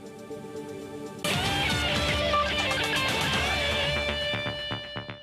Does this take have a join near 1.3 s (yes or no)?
yes